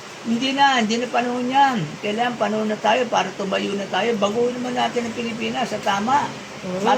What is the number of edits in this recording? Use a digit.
0